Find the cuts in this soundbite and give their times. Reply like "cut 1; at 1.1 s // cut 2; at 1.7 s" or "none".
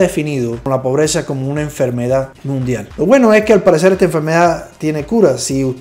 cut 1; at 2.9 s